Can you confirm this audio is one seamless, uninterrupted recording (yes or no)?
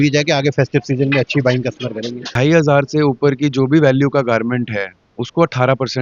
no